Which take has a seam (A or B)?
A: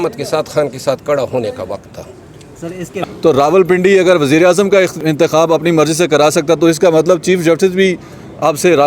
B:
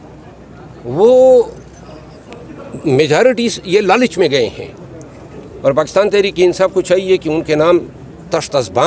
A